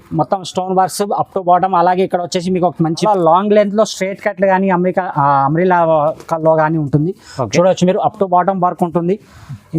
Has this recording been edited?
yes; 1 cut; at 3.0 s

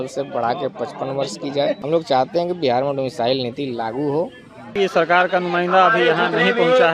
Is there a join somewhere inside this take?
yes; 2 cuts; at 1.8 s, 4.7 s

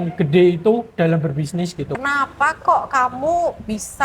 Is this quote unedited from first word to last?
no; 1 cut; at 2.0 s

